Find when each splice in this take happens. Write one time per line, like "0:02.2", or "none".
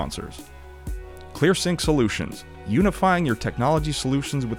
0:01.0